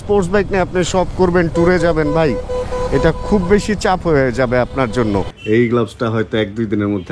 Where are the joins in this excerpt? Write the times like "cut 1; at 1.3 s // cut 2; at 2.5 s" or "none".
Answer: cut 1; at 5.3 s